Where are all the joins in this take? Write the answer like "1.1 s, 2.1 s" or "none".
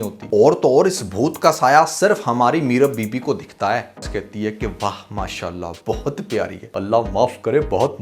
4.0 s